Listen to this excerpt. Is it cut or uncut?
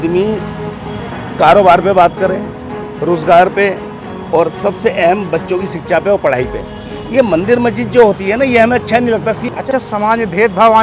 cut